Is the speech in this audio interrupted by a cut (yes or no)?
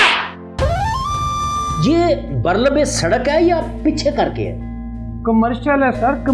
yes